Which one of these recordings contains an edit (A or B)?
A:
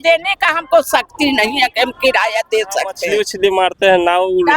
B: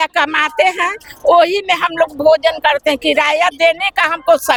A